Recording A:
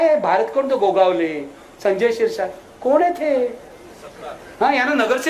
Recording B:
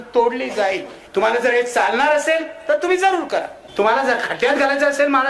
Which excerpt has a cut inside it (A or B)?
B